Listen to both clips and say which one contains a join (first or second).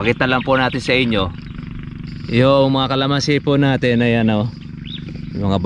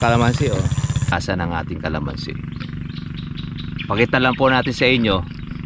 second